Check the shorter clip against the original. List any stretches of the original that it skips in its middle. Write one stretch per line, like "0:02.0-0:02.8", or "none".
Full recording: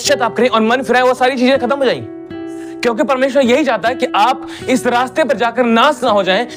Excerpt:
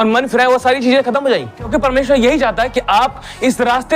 0:02.2-0:02.9